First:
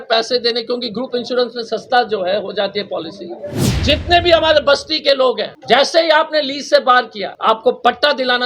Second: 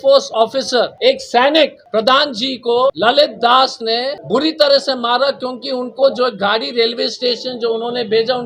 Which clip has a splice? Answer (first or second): first